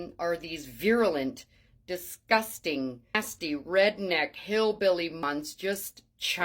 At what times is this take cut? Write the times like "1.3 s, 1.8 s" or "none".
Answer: 3.1 s, 5.2 s